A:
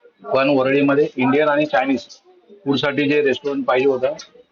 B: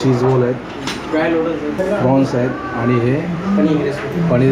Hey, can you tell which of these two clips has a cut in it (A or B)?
B